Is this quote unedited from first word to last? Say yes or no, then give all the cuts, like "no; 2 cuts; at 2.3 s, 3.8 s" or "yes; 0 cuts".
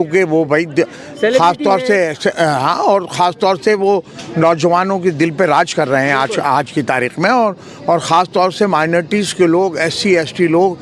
yes; 0 cuts